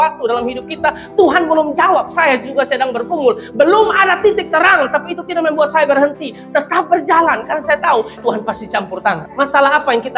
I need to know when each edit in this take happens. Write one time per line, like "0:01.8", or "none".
0:08.2
0:09.3